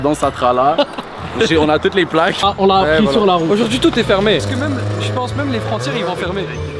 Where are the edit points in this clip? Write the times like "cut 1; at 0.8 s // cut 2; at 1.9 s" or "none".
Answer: cut 1; at 2.4 s // cut 2; at 4.4 s